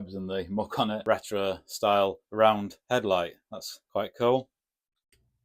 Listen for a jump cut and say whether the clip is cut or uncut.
cut